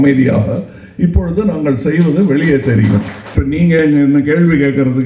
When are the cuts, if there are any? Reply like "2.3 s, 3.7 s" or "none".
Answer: 3.4 s